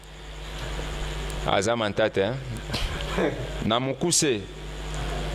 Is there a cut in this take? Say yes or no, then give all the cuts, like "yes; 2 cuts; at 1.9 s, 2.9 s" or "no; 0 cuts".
no; 0 cuts